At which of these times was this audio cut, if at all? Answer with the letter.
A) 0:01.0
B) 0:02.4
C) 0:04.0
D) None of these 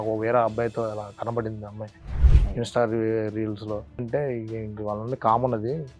C